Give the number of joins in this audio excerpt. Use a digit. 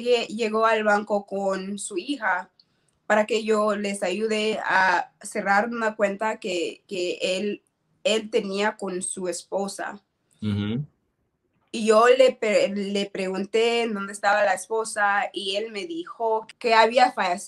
1